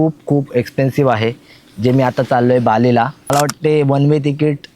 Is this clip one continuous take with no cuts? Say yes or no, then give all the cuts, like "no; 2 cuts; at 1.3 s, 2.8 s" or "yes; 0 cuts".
no; 1 cut; at 3.3 s